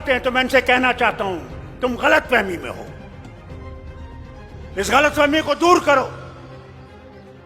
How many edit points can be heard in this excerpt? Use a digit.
2